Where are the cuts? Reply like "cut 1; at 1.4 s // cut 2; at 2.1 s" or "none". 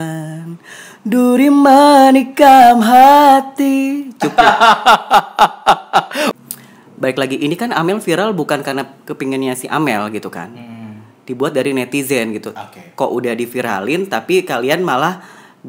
cut 1; at 6.4 s